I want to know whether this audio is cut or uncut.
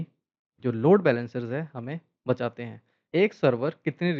cut